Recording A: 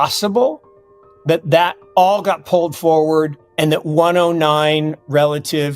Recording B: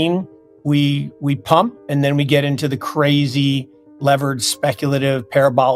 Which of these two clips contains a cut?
A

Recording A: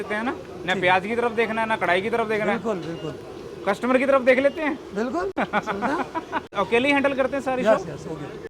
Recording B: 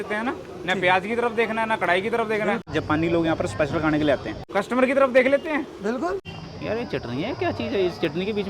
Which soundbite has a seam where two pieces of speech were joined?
B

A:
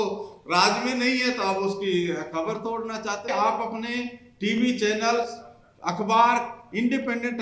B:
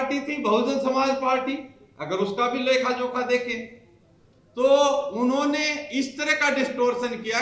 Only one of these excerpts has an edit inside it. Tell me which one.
A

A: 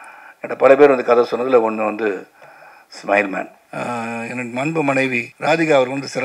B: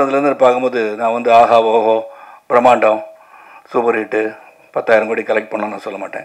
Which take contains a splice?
A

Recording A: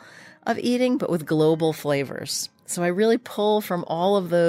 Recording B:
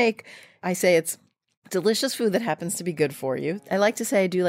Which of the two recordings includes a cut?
B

